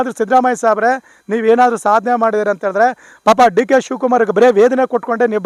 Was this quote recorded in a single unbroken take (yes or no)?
yes